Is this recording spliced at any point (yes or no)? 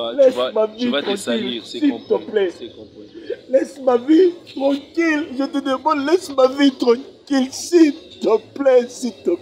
no